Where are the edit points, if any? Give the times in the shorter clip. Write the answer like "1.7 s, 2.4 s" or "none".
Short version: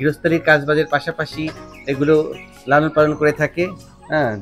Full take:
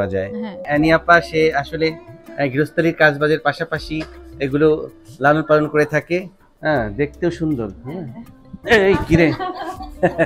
none